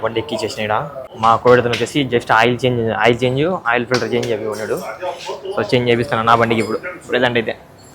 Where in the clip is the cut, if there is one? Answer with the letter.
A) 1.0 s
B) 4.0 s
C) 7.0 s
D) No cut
A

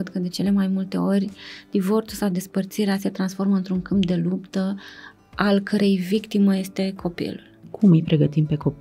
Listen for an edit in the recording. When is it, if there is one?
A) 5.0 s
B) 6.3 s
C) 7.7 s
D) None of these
C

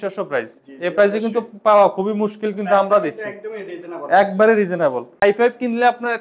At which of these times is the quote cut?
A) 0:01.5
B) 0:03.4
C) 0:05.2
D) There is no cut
C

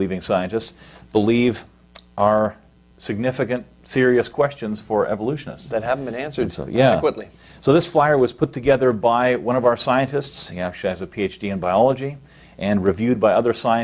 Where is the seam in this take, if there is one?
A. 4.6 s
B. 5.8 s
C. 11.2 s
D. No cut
B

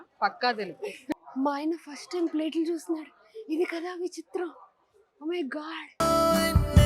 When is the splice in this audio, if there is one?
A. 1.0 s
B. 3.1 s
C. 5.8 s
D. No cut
A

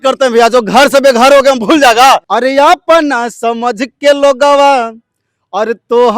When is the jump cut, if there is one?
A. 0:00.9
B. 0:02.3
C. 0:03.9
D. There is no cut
B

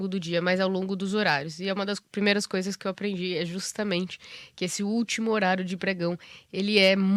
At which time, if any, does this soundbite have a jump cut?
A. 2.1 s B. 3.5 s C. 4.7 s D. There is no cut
D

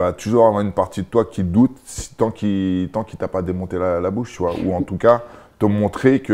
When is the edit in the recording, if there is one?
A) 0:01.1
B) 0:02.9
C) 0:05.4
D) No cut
D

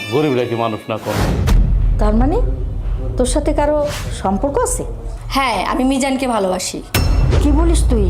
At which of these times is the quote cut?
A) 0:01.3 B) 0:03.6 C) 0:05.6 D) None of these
A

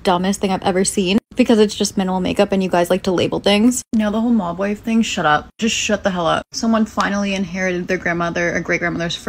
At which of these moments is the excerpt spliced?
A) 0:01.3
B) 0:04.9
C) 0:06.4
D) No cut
D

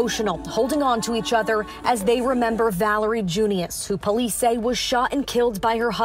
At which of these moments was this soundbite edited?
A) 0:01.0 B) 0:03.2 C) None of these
C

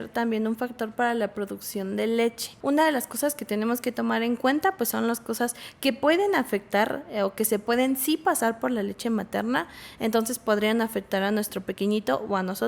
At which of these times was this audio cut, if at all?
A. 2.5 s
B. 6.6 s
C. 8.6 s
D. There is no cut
A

